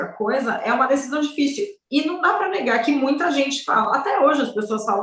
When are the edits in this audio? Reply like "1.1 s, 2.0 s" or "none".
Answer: none